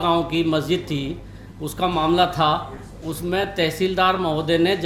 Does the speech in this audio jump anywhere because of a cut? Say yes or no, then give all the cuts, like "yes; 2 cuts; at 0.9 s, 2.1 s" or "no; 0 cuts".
no; 0 cuts